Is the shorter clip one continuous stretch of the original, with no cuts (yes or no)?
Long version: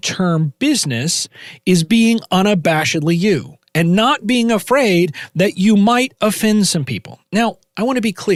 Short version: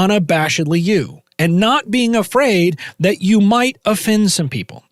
yes